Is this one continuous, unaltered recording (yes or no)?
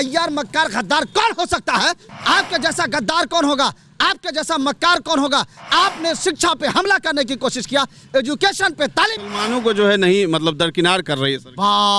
no